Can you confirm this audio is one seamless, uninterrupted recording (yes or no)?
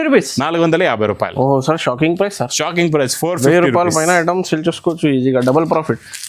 yes